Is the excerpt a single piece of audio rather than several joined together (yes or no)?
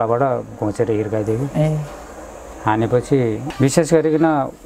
no